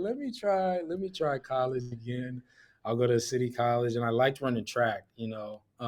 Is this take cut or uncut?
uncut